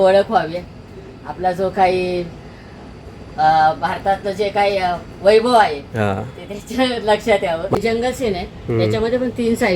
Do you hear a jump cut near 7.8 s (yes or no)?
yes